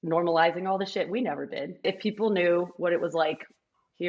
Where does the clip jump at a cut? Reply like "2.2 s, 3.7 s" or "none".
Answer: 1.8 s